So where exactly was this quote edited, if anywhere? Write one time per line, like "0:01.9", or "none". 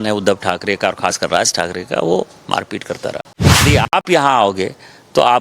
0:03.6